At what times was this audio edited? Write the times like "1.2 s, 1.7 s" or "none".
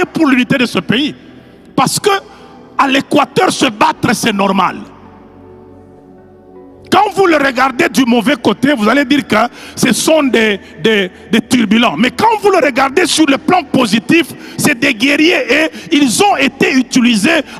none